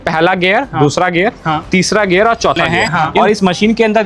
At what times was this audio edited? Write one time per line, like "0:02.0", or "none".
0:02.7